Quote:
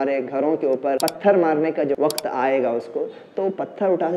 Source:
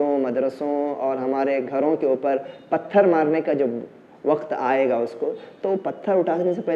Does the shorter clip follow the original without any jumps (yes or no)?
no